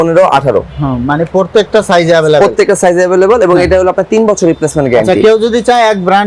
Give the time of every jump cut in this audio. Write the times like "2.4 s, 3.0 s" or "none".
none